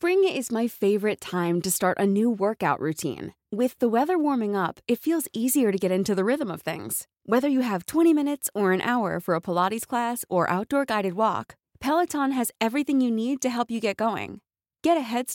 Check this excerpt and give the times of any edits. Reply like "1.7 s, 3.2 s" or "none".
none